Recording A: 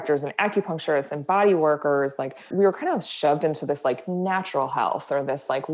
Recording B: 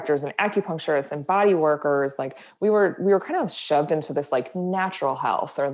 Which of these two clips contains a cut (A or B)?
A